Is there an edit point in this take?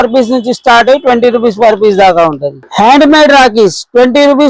yes; 1 cut; at 2.6 s

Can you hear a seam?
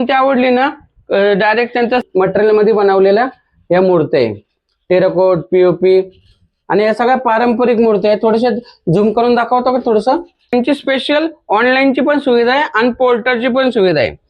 yes; 2 cuts; at 2.0 s, 10.5 s

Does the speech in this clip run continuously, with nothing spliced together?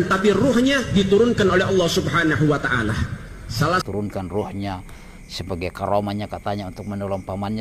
no; 1 cut; at 3.8 s

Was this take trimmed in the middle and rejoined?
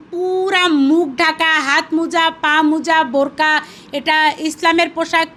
no; 0 cuts

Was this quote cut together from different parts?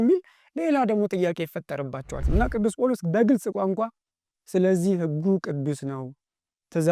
yes; 1 cut; at 2.2 s

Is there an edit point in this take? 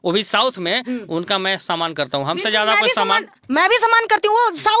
no; 0 cuts

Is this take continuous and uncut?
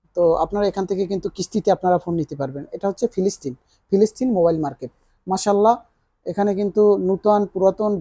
yes; 0 cuts

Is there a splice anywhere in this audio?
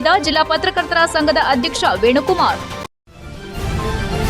yes; 1 cut; at 2.7 s

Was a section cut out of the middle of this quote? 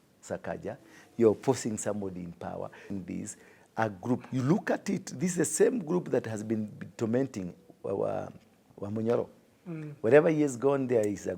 yes; 2 cuts; at 2.9 s, 8.6 s

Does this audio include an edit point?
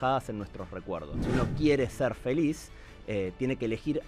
yes; 1 cut; at 1.2 s

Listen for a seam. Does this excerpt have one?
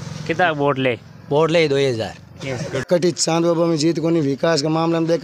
yes; 1 cut; at 2.7 s

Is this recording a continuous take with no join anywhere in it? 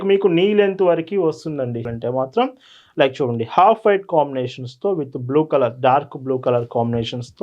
no; 1 cut; at 1.9 s

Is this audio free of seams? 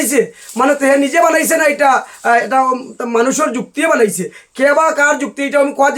yes; 0 cuts

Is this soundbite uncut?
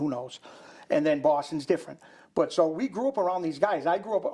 yes; 0 cuts

